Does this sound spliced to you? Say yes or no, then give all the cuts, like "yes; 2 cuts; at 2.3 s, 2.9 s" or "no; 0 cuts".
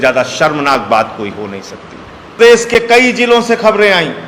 yes; 1 cut; at 2.3 s